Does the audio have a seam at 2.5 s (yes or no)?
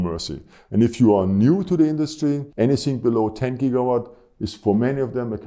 yes